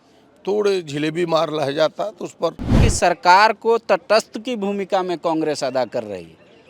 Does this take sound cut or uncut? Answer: cut